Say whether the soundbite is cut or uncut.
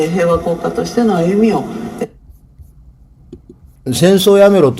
uncut